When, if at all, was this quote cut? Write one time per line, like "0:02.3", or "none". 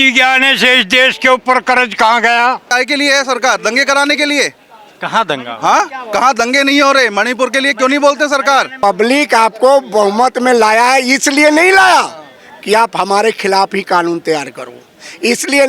0:02.7
0:08.7